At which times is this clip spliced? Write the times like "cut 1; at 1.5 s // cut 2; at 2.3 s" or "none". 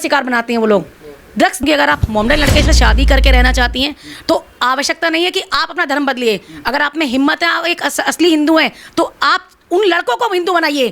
cut 1; at 1.6 s